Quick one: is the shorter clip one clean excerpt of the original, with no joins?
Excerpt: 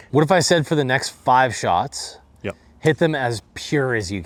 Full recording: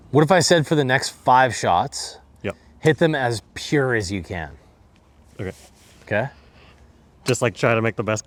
yes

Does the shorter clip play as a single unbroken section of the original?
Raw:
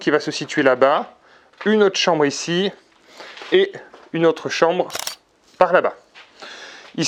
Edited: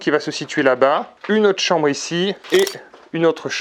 no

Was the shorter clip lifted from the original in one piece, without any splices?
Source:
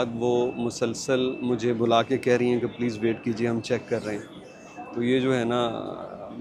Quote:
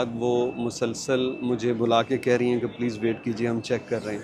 yes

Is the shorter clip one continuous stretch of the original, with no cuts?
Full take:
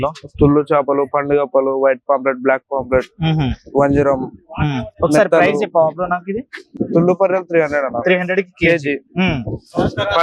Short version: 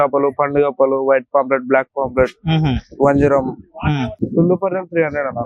no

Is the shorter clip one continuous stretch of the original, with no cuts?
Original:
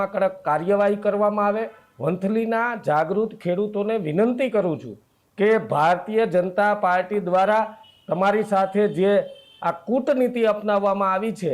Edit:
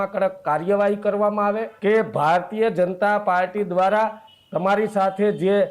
no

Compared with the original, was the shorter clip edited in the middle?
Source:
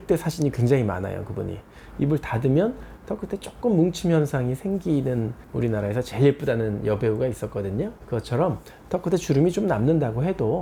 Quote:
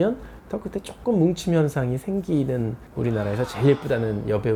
no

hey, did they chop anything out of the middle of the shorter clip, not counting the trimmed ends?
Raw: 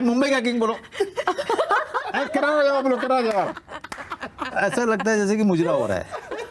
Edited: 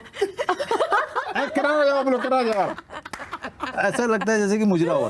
no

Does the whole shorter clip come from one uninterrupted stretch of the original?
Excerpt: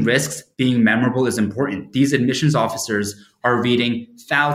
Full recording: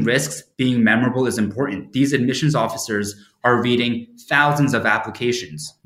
yes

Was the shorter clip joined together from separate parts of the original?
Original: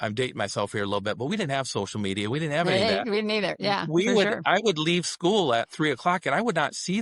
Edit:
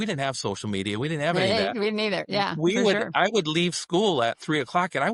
no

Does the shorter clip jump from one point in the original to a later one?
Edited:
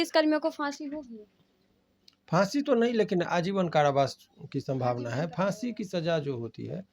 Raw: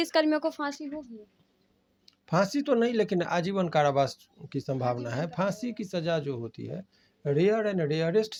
no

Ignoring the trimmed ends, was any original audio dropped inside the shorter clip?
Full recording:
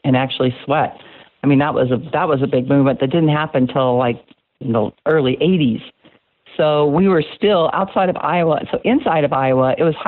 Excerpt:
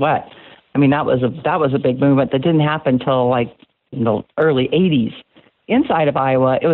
yes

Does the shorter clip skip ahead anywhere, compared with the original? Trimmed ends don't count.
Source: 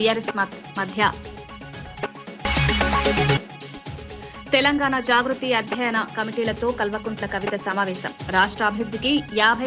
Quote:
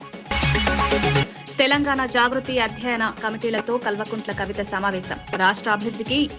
yes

